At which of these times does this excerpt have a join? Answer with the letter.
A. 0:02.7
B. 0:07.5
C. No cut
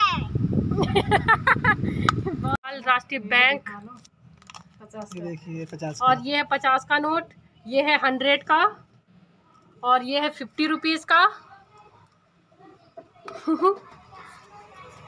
A